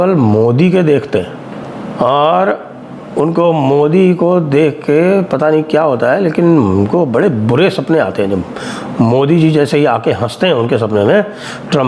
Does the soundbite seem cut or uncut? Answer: uncut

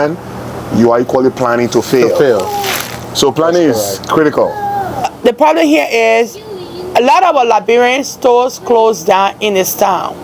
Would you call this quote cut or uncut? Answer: cut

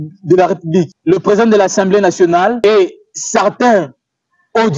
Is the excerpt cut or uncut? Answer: cut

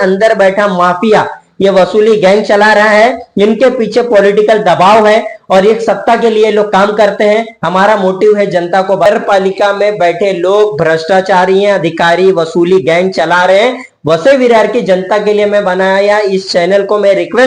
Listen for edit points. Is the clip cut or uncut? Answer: cut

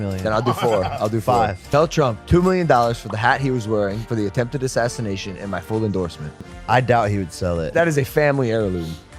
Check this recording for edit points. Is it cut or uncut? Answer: uncut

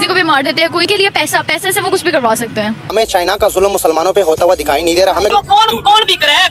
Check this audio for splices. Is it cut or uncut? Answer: cut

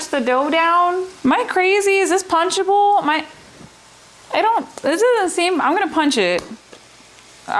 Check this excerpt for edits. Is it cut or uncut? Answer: uncut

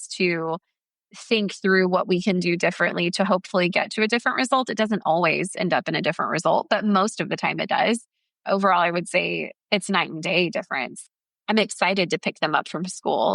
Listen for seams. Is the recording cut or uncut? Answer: cut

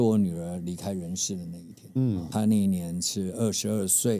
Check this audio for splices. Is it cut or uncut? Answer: uncut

